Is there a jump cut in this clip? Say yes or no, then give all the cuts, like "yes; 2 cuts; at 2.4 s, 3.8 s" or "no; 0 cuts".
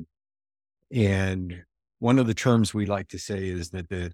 yes; 1 cut; at 1.8 s